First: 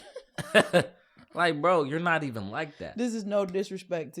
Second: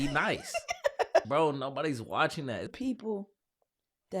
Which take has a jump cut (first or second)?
second